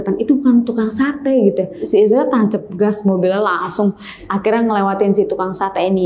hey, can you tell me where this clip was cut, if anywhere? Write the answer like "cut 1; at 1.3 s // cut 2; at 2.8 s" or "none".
cut 1; at 4.2 s